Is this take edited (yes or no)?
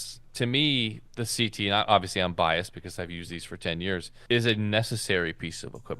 yes